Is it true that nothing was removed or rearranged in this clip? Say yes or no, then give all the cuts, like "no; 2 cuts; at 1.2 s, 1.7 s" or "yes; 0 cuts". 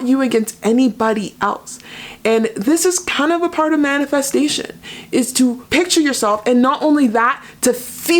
no; 1 cut; at 5.6 s